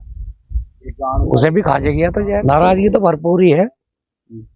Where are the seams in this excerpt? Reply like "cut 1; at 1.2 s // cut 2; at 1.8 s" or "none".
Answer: cut 1; at 2.4 s